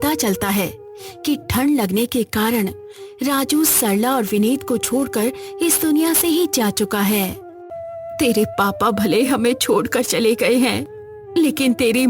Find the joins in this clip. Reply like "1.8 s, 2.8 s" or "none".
7.8 s